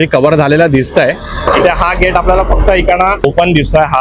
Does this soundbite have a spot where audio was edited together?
yes; 2 cuts; at 1.4 s, 3.2 s

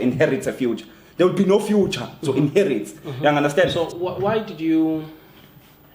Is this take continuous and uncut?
no; 1 cut; at 3.7 s

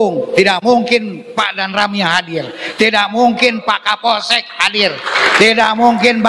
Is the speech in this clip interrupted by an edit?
yes; 1 cut; at 1.2 s

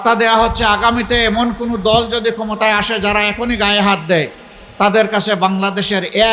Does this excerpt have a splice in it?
no; 0 cuts

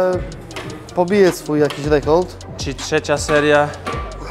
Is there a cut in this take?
no; 0 cuts

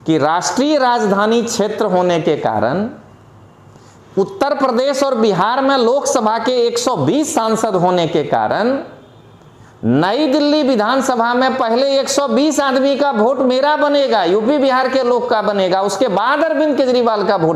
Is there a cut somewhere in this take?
no; 0 cuts

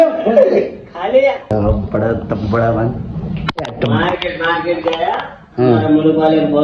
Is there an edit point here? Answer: yes; 1 cut; at 1.5 s

